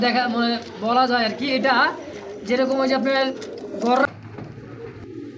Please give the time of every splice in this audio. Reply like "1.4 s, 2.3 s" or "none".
4.1 s